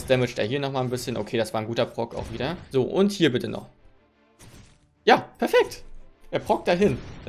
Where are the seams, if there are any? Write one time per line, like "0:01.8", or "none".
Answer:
0:02.6